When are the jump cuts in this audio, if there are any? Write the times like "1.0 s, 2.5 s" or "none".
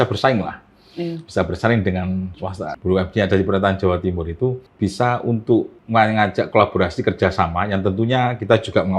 2.7 s, 4.7 s, 5.8 s

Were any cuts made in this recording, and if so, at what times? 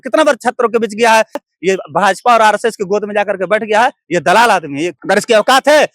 1.5 s, 4.9 s

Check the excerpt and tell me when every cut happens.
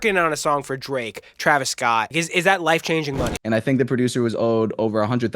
2.1 s, 3.4 s

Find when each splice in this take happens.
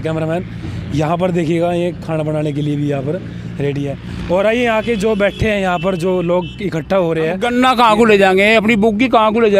7.4 s

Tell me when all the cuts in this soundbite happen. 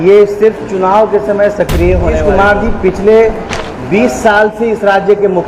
2.2 s

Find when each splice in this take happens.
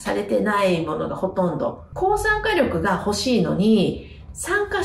1.8 s

